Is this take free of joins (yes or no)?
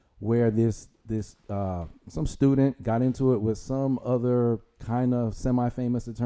yes